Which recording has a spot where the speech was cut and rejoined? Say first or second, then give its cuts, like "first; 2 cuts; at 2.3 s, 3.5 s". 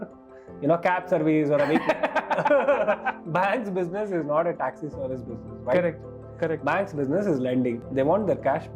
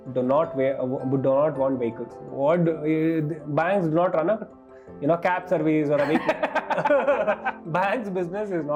first; 1 cut; at 7.8 s